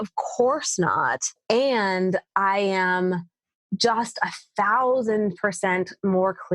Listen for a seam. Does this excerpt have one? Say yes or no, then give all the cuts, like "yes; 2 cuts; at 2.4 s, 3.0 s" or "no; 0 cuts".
yes; 1 cut; at 1.3 s